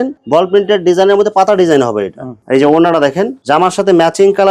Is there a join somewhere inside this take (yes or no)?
no